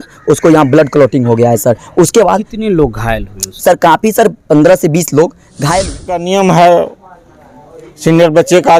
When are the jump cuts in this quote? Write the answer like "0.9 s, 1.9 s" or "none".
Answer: 6.2 s

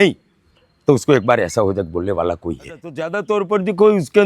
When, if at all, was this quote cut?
3.1 s

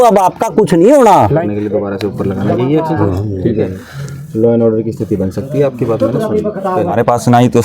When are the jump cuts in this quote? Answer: 1.4 s, 7.0 s

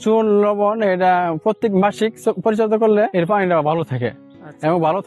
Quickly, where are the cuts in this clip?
3.1 s

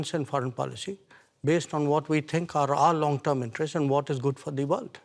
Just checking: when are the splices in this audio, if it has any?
none

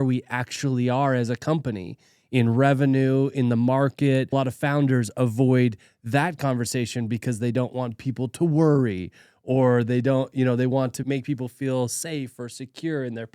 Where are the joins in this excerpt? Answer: 4.3 s, 11.0 s

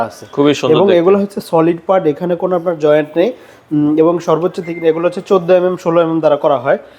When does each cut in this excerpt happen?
none

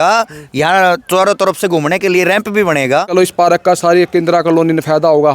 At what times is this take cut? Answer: 3.1 s

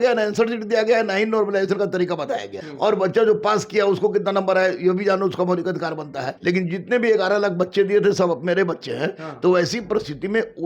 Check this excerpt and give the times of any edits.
2.6 s, 6.2 s

